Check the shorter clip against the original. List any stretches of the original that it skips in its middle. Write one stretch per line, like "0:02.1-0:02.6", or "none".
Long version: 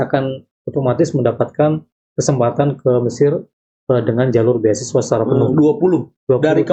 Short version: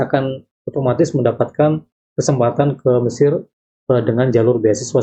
none